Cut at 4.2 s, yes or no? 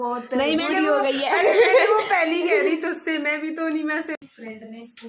yes